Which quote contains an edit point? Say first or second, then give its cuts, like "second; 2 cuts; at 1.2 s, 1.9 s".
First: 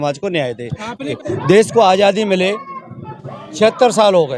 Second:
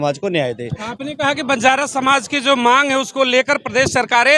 first; 1 cut; at 1.1 s